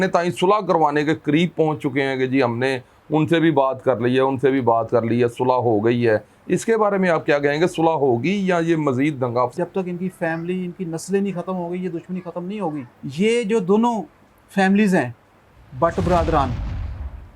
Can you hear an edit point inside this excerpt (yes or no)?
yes